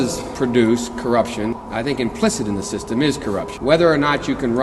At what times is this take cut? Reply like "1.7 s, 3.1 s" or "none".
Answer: 1.6 s, 3.5 s